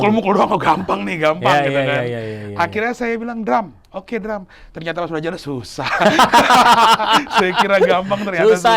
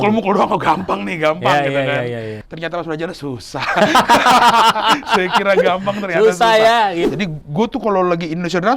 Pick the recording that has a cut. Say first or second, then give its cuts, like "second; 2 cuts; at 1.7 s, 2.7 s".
second; 2 cuts; at 2.4 s, 7.0 s